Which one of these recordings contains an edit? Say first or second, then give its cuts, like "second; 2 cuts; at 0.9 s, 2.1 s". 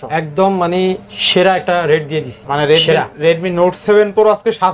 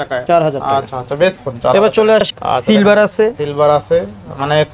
second; 1 cut; at 2.2 s